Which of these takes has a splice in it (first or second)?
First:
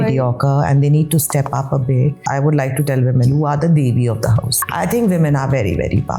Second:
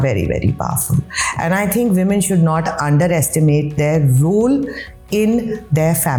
first